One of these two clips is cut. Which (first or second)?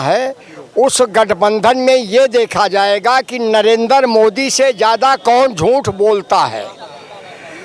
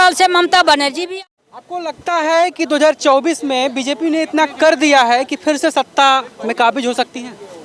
second